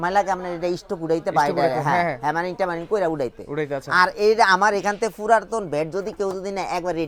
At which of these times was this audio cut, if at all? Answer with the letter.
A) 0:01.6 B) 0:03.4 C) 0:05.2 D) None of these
D